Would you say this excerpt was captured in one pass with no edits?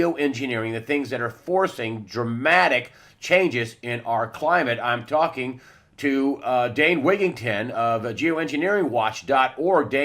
no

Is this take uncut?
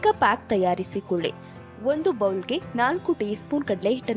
no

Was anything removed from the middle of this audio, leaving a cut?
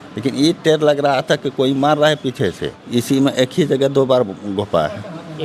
yes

